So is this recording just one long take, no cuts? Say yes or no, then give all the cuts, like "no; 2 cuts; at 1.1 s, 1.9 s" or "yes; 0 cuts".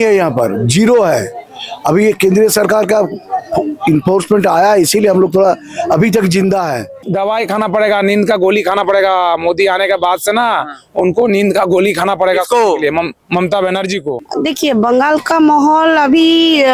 no; 2 cuts; at 7.0 s, 14.2 s